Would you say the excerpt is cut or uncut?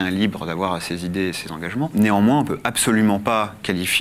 cut